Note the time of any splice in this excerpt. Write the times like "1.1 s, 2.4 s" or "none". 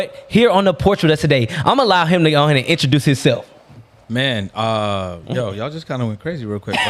none

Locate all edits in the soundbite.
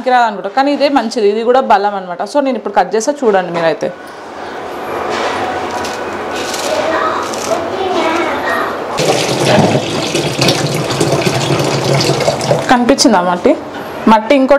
9.0 s

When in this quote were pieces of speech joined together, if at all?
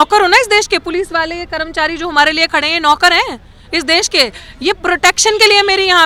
none

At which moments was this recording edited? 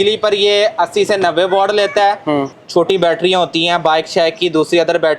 2.5 s

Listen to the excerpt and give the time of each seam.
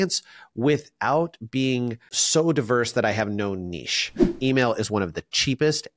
4.3 s

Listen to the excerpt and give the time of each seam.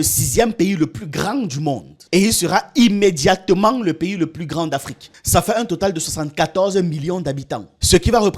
1.9 s, 5.0 s

